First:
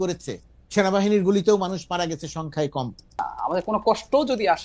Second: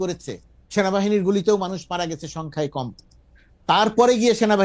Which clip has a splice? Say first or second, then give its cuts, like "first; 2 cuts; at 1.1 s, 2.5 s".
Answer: first; 1 cut; at 3.3 s